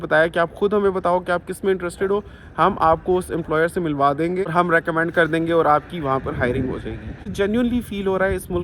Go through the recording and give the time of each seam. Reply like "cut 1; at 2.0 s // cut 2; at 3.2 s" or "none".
cut 1; at 4.5 s // cut 2; at 7.3 s